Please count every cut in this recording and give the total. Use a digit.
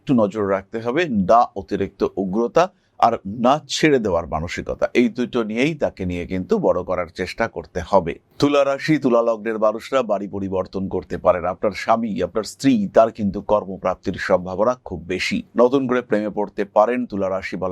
2